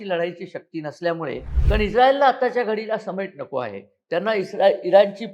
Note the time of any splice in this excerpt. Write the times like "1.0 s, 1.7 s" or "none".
1.5 s